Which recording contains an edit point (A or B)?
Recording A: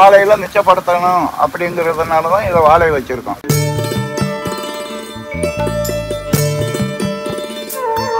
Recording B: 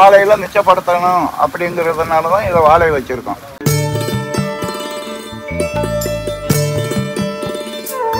A